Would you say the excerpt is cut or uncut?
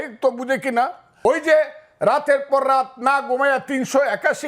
cut